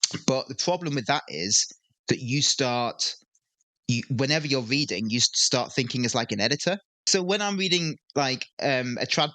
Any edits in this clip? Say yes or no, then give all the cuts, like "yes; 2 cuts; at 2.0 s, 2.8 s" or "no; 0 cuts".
yes; 1 cut; at 7.0 s